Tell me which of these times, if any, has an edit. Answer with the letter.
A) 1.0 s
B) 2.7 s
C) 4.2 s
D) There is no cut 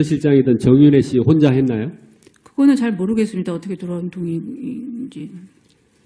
D